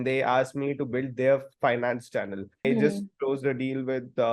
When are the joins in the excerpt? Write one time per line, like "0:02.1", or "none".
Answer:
0:02.7